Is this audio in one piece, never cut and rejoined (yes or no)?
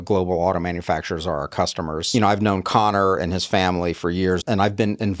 no